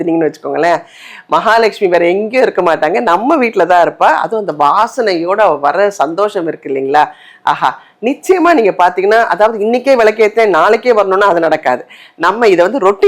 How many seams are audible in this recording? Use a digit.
0